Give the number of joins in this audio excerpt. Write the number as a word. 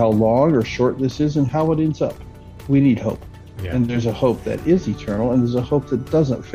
one